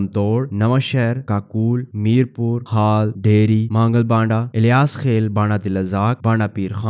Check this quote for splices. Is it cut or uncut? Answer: uncut